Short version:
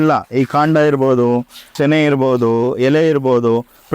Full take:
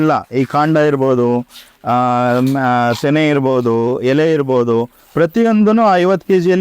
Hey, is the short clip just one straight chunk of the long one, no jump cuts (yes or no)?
no